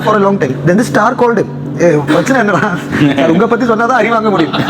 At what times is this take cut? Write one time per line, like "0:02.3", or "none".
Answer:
none